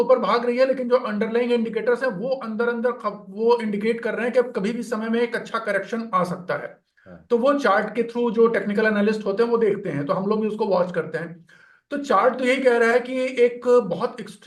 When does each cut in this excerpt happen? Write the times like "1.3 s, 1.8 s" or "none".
none